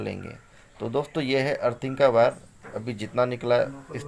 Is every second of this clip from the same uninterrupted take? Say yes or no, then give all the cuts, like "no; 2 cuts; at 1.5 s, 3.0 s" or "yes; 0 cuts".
yes; 0 cuts